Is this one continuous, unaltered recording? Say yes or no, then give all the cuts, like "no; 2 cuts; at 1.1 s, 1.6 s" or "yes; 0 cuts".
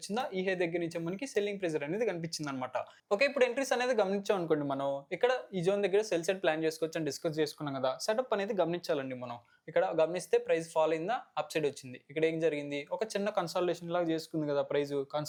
yes; 0 cuts